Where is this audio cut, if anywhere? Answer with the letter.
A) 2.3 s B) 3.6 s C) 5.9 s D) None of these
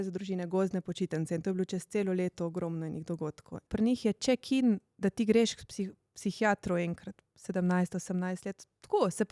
B